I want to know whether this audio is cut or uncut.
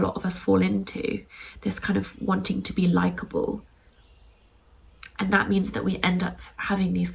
uncut